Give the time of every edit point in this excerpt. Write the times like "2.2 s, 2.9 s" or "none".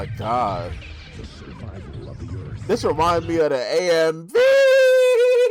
none

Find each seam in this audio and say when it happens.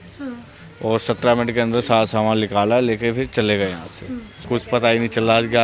4.4 s

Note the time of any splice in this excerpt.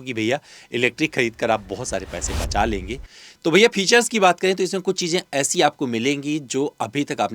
3.1 s

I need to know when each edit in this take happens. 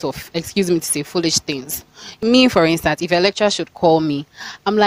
2.1 s

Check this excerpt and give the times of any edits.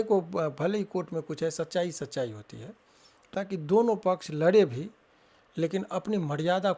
3.3 s

